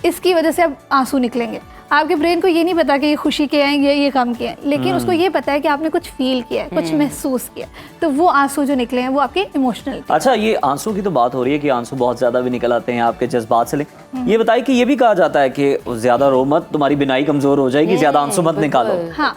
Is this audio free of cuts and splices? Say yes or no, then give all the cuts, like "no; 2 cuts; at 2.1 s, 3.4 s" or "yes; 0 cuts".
yes; 0 cuts